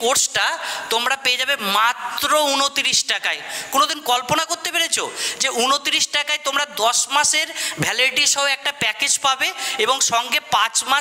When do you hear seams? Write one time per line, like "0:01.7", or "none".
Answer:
none

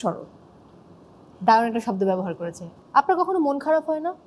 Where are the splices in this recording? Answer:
0:02.7

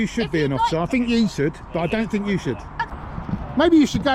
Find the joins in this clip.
0:02.9

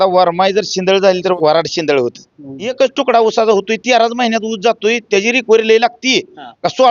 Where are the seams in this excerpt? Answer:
0:01.3
0:02.7

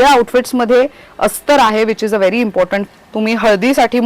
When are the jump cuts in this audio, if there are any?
0:02.9

